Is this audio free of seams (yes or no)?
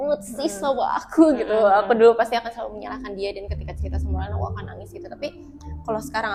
yes